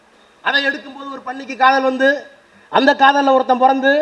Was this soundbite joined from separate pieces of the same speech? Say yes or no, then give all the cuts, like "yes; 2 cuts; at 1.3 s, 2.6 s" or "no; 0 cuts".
no; 0 cuts